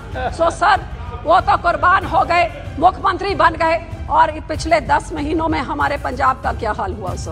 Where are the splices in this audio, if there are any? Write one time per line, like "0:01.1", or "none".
none